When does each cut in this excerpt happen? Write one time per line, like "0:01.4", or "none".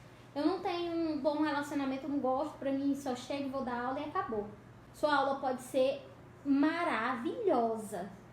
0:04.8